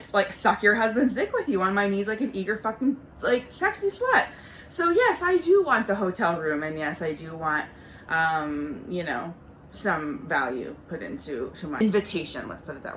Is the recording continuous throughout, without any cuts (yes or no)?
no